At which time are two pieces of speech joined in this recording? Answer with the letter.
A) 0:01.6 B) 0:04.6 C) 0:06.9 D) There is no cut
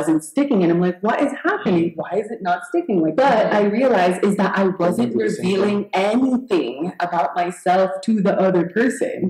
A